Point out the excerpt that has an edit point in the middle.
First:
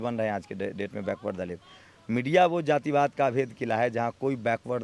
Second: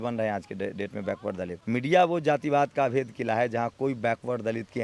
second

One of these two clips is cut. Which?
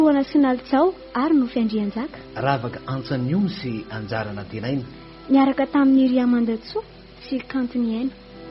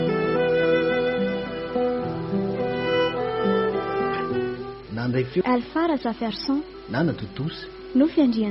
second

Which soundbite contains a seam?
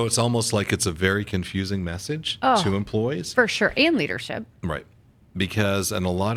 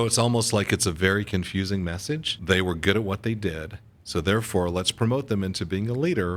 second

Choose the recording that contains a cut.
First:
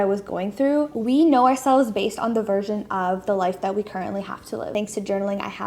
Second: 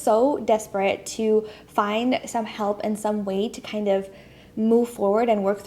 first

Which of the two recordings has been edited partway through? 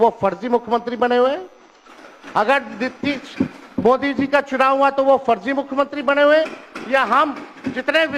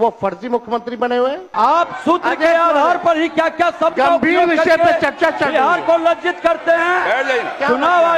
second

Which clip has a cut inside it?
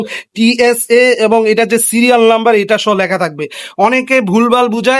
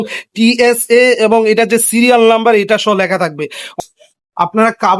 second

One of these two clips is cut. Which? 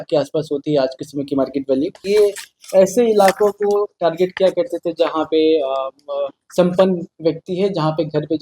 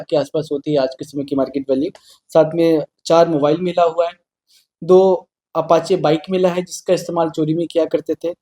first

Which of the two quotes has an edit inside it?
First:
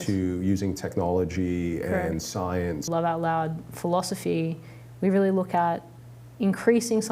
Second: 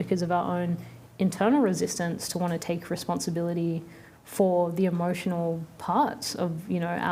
first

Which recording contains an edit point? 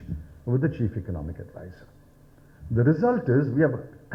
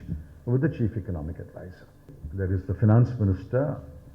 second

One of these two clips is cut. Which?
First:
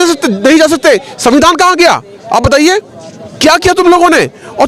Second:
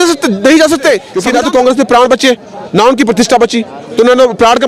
second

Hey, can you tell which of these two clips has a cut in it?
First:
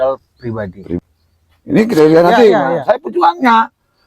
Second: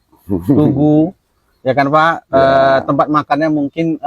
first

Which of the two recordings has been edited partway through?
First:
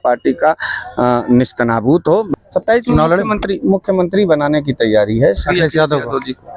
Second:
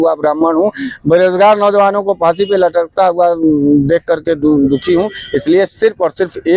first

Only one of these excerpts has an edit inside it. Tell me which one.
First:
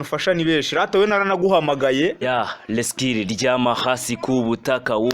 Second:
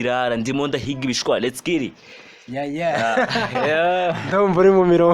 first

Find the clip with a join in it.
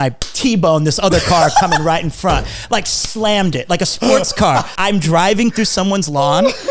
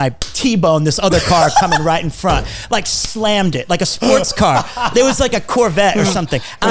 first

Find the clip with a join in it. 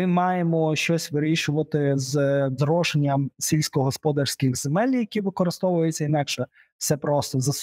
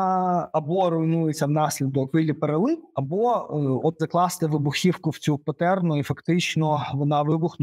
second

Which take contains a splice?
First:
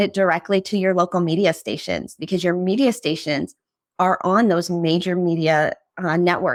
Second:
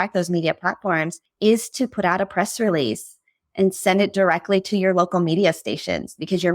second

